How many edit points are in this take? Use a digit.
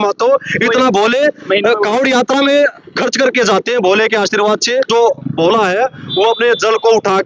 1